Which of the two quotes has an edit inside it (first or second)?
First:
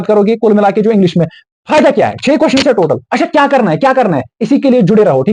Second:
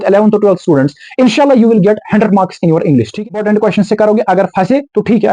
second